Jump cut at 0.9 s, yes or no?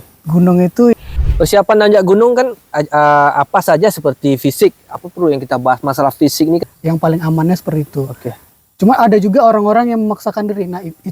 yes